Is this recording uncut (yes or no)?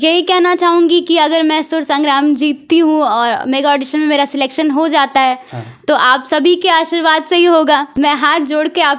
no